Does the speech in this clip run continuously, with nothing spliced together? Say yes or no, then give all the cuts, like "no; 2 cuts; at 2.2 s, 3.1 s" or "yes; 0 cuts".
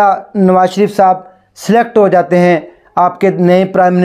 yes; 0 cuts